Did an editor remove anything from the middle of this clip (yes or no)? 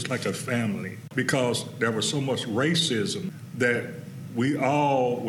yes